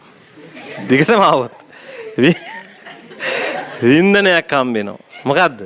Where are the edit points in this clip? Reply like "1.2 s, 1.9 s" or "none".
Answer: none